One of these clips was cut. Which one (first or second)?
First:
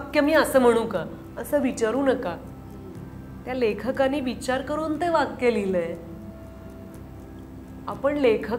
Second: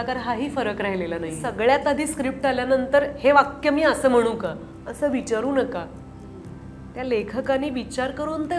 second